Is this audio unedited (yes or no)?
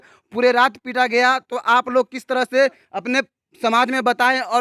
yes